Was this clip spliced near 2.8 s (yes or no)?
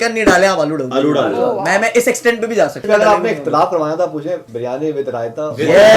yes